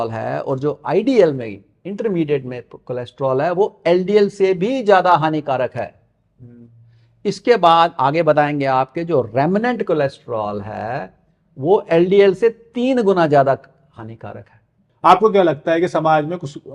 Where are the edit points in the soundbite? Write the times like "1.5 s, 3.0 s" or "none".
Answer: 14.8 s